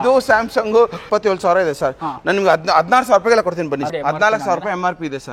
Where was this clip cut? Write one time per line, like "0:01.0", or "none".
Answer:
0:01.0
0:03.9